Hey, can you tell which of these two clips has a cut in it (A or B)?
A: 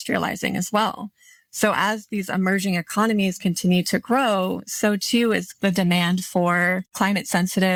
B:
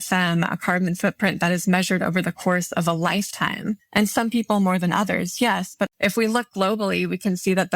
B